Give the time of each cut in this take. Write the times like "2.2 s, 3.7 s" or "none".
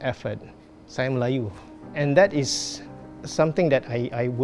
1.8 s